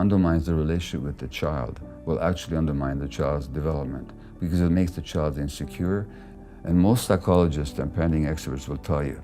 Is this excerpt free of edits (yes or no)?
no